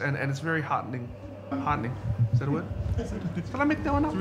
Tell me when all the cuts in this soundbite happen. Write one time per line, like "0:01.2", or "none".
none